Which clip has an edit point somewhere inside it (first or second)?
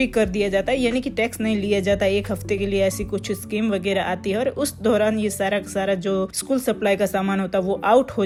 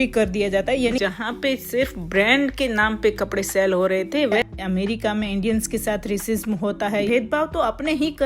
second